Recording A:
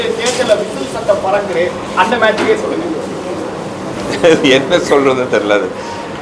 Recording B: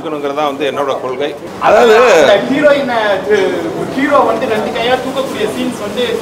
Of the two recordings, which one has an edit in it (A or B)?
B